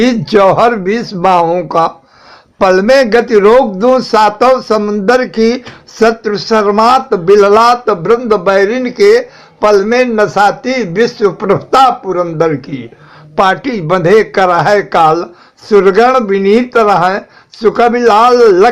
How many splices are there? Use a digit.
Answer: 0